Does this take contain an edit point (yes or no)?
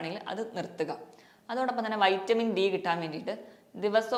no